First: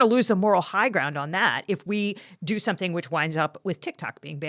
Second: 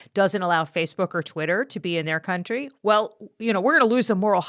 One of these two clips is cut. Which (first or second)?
first